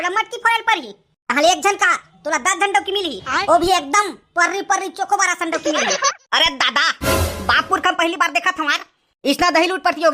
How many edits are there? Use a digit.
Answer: 1